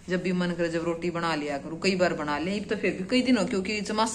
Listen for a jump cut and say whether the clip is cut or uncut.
uncut